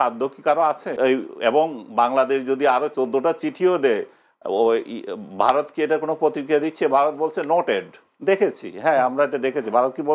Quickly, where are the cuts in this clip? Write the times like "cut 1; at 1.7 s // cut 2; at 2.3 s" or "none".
none